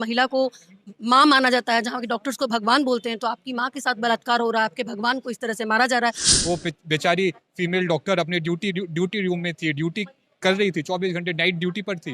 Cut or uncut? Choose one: cut